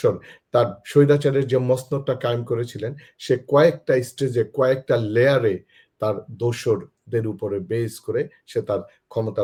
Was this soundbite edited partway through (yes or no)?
no